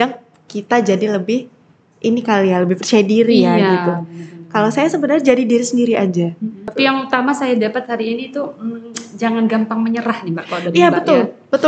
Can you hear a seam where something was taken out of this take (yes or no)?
yes